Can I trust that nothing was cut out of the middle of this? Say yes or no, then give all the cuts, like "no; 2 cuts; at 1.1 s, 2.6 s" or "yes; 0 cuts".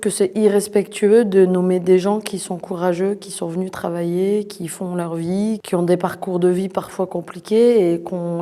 yes; 0 cuts